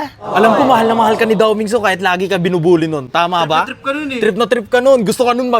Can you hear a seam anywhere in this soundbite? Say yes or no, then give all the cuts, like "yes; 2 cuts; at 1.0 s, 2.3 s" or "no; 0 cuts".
no; 0 cuts